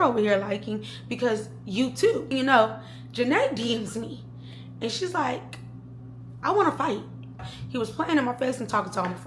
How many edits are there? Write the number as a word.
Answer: two